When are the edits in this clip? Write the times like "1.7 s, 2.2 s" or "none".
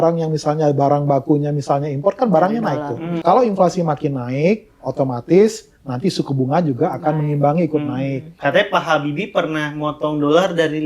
3.2 s, 8.4 s